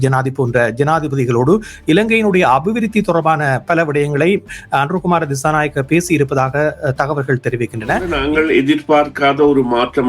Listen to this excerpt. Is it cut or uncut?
cut